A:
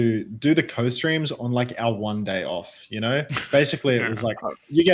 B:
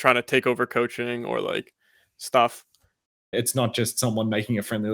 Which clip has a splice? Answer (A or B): B